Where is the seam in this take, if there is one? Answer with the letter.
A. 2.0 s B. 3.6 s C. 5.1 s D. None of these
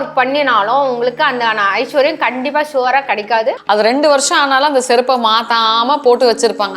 B